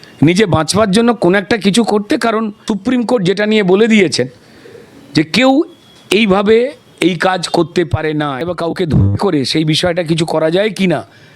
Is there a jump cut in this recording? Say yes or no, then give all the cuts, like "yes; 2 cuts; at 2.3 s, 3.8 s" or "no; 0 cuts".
yes; 2 cuts; at 2.6 s, 8.4 s